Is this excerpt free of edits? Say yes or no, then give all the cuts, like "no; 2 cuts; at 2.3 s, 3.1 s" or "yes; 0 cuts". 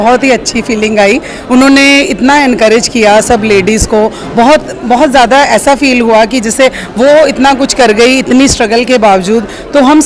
yes; 0 cuts